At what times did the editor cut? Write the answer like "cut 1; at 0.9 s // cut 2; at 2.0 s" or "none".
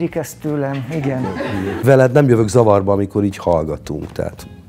cut 1; at 1.8 s